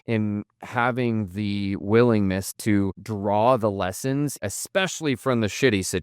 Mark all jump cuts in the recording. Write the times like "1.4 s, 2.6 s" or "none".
2.6 s, 4.4 s